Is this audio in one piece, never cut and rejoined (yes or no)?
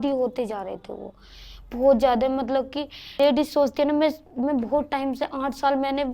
no